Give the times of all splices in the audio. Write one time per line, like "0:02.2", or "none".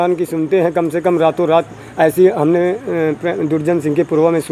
none